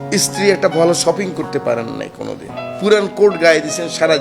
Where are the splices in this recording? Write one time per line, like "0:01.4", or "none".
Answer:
0:02.6